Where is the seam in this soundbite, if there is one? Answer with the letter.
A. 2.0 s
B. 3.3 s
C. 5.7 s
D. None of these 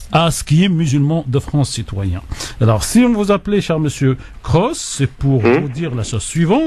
B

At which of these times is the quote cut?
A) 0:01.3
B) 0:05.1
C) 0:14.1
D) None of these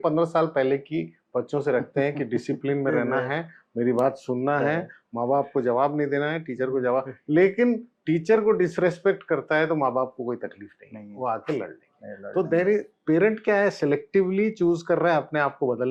D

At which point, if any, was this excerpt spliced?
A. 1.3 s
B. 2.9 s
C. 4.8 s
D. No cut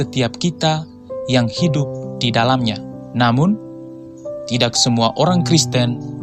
B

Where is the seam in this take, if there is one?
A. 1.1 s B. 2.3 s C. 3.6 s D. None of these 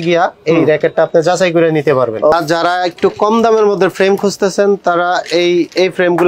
B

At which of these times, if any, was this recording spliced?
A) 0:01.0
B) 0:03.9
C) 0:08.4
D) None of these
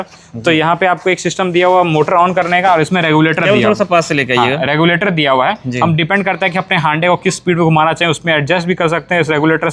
D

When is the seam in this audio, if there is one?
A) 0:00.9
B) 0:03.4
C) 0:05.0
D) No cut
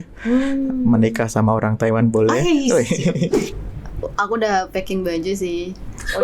B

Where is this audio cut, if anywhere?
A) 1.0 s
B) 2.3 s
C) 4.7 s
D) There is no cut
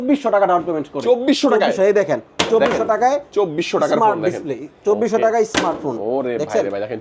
D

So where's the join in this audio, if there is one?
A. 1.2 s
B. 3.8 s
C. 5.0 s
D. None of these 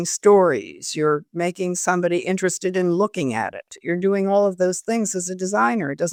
D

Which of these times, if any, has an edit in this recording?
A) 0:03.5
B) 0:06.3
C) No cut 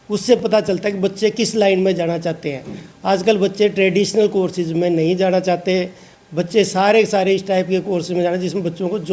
C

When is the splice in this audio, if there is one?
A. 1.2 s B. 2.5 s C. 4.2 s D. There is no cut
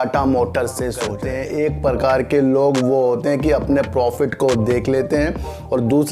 A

